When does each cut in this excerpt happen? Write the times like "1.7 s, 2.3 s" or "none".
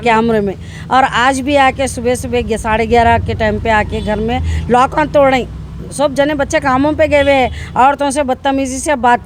none